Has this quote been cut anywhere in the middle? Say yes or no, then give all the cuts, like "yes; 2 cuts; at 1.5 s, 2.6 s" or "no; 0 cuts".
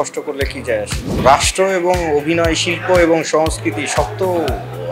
yes; 1 cut; at 1.1 s